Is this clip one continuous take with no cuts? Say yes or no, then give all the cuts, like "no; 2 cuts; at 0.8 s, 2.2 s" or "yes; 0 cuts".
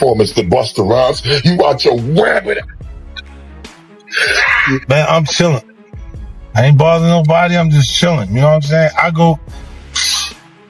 no; 1 cut; at 4.8 s